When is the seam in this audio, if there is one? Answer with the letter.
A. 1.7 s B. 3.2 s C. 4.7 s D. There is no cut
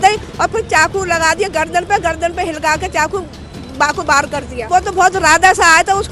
C